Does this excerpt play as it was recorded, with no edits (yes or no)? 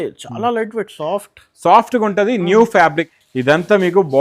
no